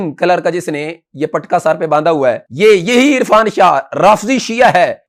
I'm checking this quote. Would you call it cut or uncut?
uncut